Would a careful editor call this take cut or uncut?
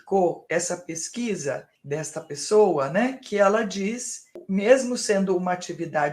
cut